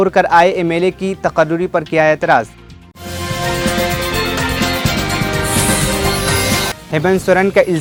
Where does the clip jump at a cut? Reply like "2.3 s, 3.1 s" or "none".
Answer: none